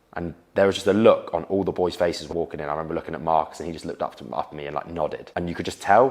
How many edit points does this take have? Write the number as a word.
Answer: two